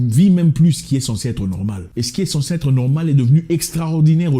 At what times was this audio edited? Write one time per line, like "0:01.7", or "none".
0:01.8

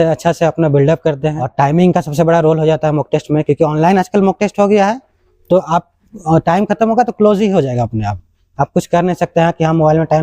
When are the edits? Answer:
0:01.4

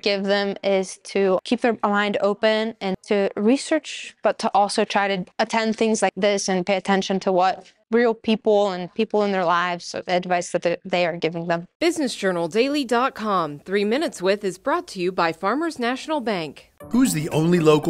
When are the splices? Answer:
0:01.4
0:03.0
0:05.3
0:06.2
0:07.8
0:11.7

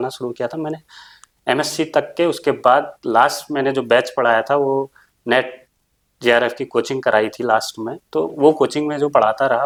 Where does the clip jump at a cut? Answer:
none

